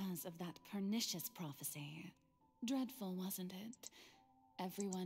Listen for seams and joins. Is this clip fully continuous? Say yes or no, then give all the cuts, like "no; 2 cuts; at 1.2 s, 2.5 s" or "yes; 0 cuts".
yes; 0 cuts